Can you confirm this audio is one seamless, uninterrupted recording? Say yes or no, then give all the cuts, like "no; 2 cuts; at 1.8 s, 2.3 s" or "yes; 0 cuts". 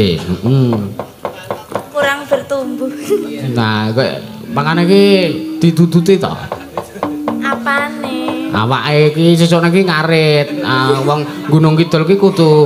yes; 0 cuts